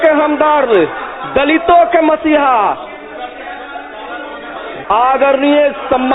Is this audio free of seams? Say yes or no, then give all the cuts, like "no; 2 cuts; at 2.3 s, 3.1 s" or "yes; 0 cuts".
no; 1 cut; at 4.7 s